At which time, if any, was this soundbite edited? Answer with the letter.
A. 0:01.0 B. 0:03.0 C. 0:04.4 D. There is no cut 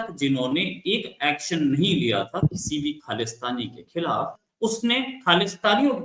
C